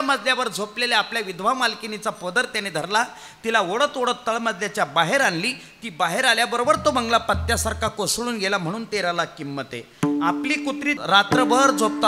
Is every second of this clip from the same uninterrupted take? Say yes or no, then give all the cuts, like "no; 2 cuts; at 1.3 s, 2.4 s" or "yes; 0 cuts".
no; 1 cut; at 11.0 s